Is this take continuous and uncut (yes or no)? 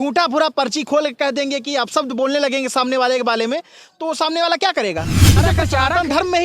no